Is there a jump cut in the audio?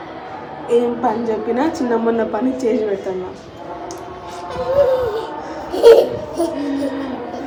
no; 0 cuts

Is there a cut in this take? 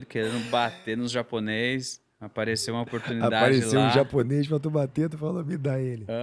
no; 0 cuts

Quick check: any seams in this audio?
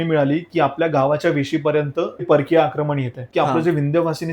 yes; 2 cuts; at 2.2 s, 3.3 s

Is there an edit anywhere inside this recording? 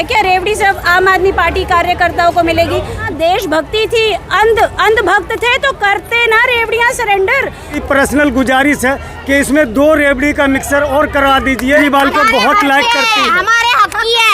yes; 3 cuts; at 3.1 s, 7.8 s, 11.8 s

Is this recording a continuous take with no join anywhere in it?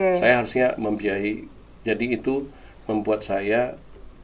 yes; 0 cuts

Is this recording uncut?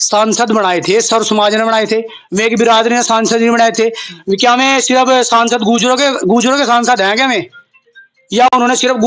yes; 0 cuts

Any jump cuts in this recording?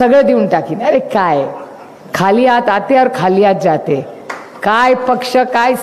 no; 0 cuts

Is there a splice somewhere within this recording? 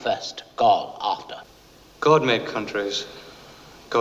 yes; 1 cut; at 1.6 s

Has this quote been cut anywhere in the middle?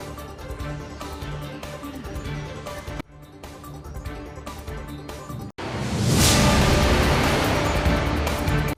no; 0 cuts

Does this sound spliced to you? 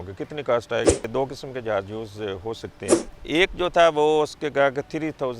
yes; 2 cuts; at 1.1 s, 3.1 s

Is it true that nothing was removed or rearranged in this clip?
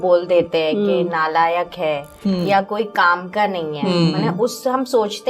yes; 0 cuts

